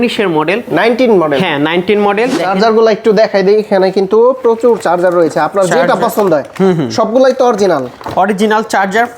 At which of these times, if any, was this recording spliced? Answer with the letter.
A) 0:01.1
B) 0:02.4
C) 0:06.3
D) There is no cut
B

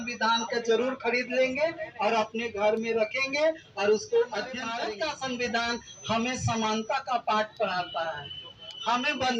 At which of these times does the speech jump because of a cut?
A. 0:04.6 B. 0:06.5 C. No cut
A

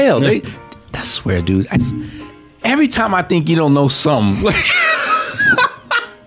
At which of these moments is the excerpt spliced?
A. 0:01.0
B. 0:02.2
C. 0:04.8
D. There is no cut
B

